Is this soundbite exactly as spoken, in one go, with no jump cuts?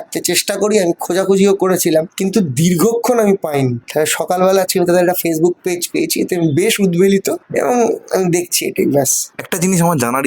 yes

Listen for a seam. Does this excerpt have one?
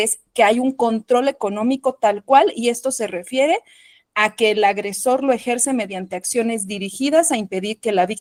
no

